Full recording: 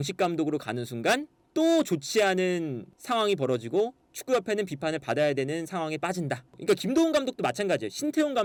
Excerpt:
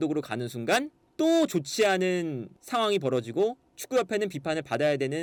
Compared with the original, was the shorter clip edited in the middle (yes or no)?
no